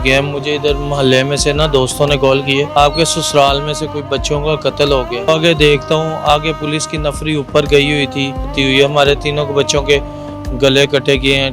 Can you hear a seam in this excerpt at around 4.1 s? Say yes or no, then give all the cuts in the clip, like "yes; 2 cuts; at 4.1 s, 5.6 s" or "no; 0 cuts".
no; 3 cuts; at 2.7 s, 5.3 s, 8.5 s